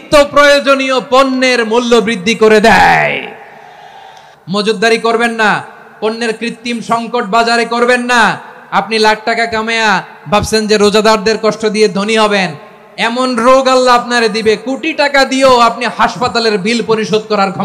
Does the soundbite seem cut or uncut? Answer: cut